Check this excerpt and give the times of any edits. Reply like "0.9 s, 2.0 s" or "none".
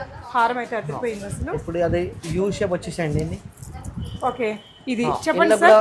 none